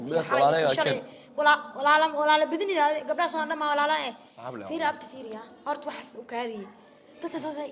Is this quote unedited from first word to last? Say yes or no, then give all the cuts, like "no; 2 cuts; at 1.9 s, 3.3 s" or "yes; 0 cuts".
yes; 0 cuts